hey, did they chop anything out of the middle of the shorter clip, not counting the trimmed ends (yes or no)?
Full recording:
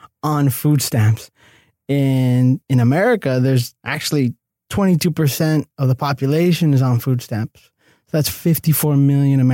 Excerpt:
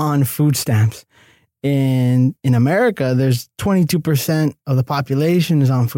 yes